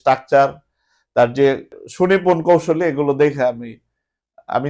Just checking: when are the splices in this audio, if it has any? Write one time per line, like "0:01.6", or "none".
0:01.8